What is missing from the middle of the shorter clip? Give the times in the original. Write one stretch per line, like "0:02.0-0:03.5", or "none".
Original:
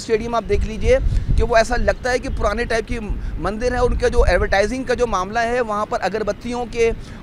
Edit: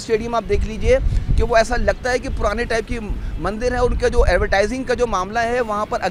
none